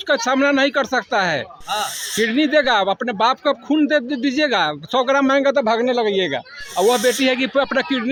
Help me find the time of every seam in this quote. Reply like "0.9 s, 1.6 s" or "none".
none

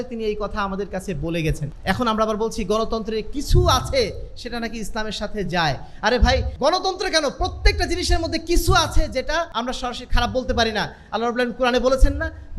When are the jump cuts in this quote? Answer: 1.7 s, 6.5 s, 9.5 s

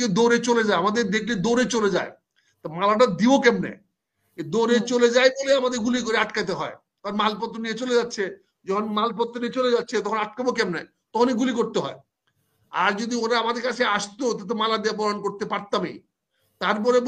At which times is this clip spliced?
none

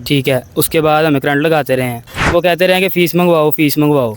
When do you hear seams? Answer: 2.1 s

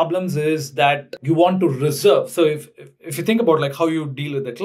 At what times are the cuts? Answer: 1.1 s

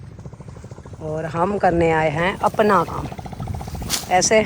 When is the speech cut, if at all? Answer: 2.9 s

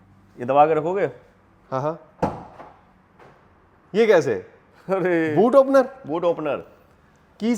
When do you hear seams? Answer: none

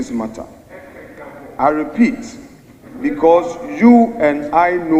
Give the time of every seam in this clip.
none

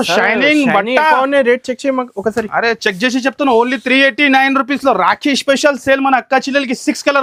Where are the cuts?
none

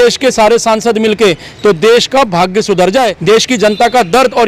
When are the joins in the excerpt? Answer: 3.1 s

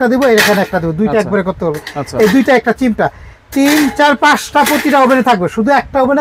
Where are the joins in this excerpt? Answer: none

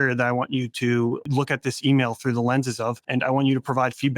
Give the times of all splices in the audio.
1.2 s, 3.0 s

